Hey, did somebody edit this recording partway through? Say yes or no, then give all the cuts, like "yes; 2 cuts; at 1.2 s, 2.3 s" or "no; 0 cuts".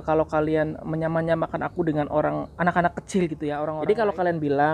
yes; 1 cut; at 3.8 s